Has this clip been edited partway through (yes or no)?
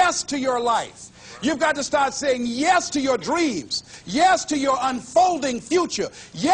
no